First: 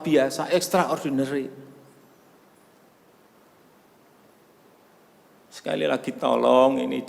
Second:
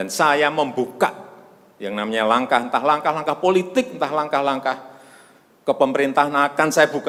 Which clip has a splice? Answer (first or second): first